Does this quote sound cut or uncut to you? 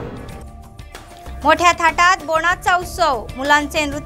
cut